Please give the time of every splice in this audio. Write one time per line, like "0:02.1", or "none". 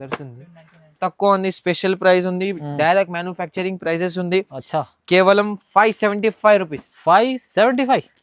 0:01.0